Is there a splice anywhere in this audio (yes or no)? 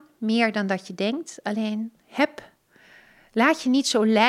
no